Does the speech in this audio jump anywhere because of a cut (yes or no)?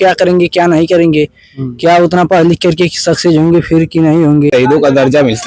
yes